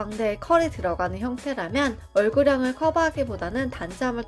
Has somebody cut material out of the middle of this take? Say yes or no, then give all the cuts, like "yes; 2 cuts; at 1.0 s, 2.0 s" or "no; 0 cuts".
no; 0 cuts